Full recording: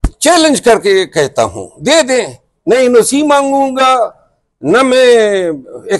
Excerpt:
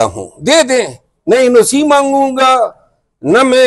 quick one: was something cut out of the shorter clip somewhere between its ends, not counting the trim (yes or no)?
no